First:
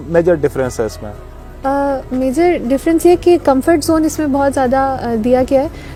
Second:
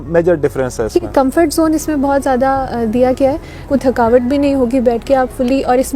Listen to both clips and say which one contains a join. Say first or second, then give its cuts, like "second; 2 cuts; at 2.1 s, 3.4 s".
second; 2 cuts; at 1.1 s, 3.7 s